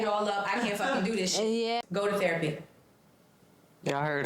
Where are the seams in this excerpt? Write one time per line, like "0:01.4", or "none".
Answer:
0:01.8